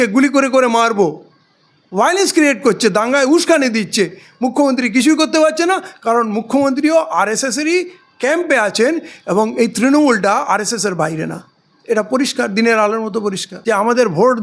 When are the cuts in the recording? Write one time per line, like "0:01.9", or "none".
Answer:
0:13.5